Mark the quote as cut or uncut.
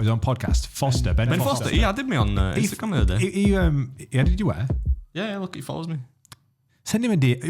cut